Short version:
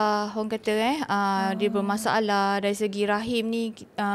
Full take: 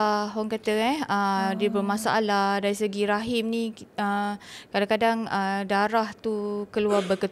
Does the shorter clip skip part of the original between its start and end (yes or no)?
no